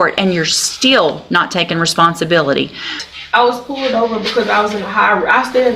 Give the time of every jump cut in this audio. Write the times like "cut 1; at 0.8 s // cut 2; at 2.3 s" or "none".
cut 1; at 3.0 s